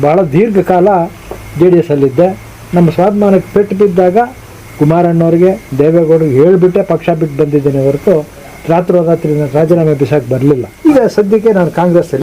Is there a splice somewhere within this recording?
yes; 1 cut; at 10.7 s

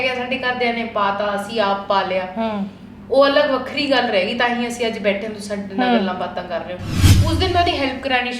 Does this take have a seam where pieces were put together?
yes; 1 cut; at 7.0 s

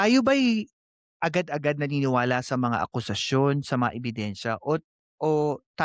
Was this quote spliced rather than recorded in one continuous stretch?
no; 0 cuts

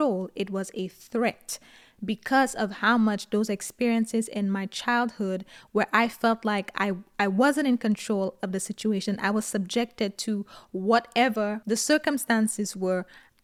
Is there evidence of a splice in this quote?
no; 0 cuts

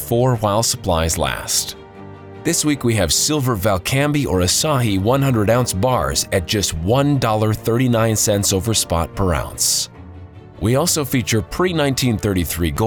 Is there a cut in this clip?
no; 0 cuts

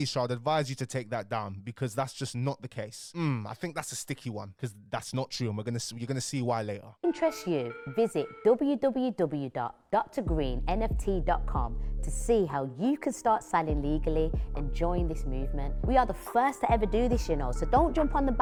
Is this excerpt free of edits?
yes; 0 cuts

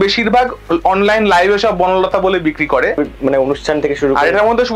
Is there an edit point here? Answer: yes; 1 cut; at 3.0 s

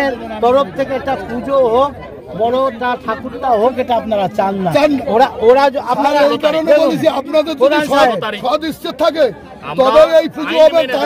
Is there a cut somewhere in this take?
yes; 1 cut; at 5.0 s

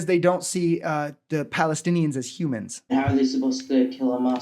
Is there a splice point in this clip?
yes; 1 cut; at 2.9 s

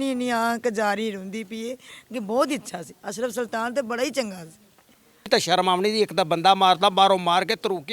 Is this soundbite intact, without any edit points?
no; 1 cut; at 5.3 s

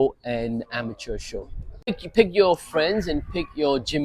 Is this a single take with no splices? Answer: no; 1 cut; at 1.9 s

